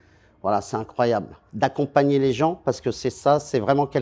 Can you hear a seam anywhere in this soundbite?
yes; 1 cut; at 1.4 s

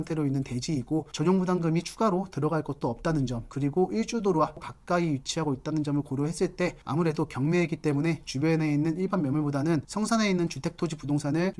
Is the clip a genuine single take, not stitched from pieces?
no; 2 cuts; at 1.1 s, 4.6 s

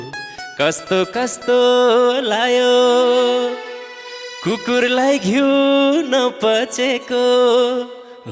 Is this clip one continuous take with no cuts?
yes; 0 cuts

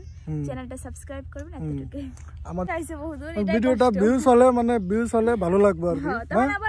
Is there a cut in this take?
yes; 1 cut; at 2.6 s

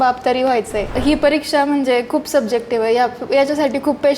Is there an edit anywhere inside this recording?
yes; 1 cut; at 1.0 s

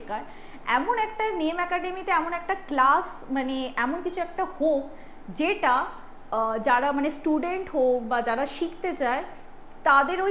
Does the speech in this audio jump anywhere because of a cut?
no; 0 cuts

